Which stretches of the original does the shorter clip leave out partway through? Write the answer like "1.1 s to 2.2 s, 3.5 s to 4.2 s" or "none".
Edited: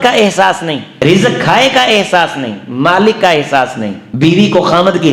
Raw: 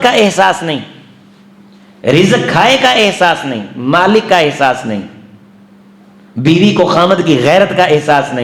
0.9 s to 2.0 s, 5.1 s to 6.2 s